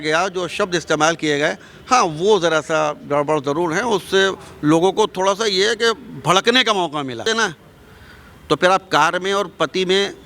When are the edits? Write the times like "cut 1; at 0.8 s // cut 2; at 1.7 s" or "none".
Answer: cut 1; at 7.2 s